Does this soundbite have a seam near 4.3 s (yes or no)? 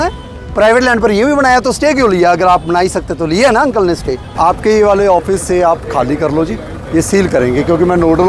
yes